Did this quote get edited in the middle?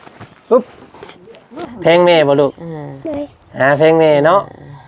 yes; 1 cut; at 1.5 s

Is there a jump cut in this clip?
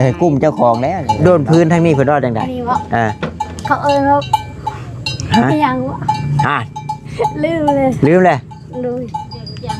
yes; 1 cut; at 1.0 s

